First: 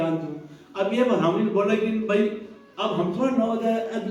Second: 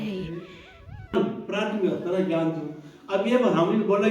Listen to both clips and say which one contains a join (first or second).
second